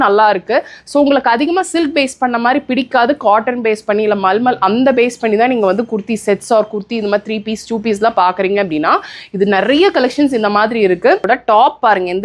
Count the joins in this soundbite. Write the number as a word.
one